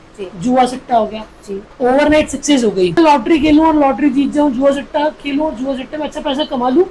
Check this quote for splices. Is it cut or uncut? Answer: cut